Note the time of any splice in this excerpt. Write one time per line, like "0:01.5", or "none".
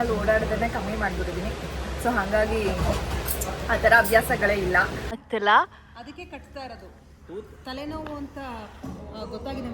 0:05.2